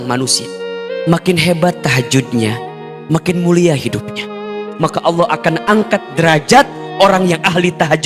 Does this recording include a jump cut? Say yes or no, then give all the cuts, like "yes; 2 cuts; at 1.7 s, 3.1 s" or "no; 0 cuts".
yes; 1 cut; at 4.6 s